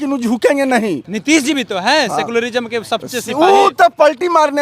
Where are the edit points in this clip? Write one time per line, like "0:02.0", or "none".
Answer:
0:01.1